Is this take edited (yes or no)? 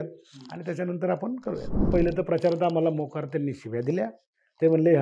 yes